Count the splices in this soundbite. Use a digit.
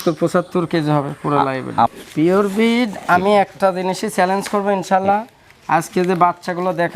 1